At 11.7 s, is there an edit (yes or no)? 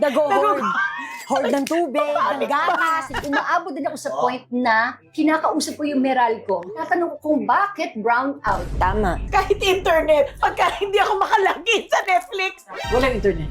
no